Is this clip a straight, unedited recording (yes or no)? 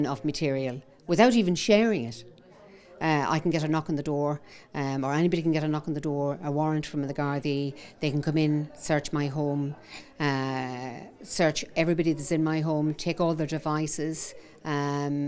yes